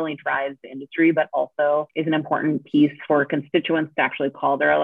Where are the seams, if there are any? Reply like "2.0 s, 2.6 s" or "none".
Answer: 1.9 s